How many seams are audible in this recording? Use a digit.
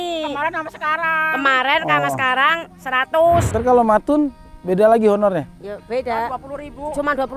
1